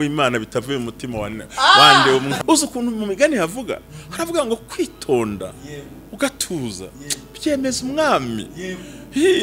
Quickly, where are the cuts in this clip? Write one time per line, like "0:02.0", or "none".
0:02.3